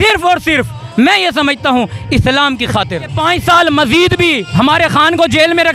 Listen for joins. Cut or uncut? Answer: cut